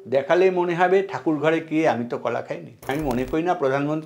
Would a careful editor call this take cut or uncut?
cut